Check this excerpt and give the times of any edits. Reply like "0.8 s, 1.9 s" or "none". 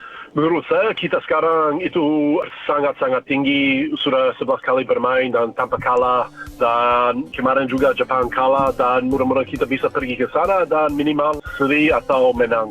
2.5 s

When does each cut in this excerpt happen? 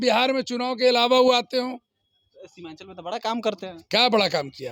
none

